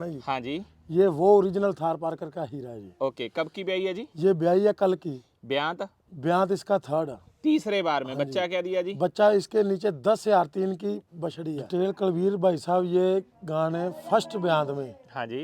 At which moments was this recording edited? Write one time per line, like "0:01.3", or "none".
0:11.6